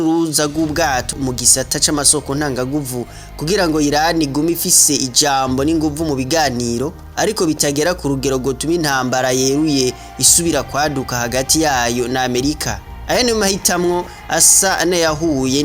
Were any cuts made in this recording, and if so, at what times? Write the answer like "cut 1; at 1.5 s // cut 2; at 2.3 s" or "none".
cut 1; at 1.1 s